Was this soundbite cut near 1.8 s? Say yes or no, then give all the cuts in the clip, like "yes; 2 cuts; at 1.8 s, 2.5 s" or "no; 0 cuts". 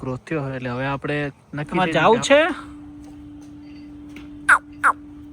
yes; 1 cut; at 1.8 s